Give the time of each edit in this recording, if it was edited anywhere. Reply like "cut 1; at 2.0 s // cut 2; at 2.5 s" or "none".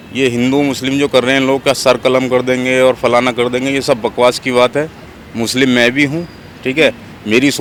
none